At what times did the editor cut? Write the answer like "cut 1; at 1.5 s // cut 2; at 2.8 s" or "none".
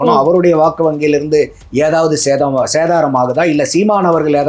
cut 1; at 1.6 s